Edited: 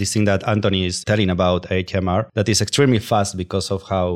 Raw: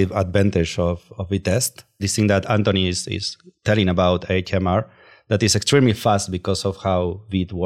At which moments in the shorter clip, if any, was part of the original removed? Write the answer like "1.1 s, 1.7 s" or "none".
1.0 s, 2.3 s